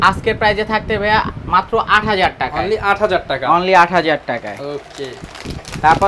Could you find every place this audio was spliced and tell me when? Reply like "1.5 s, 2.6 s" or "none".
none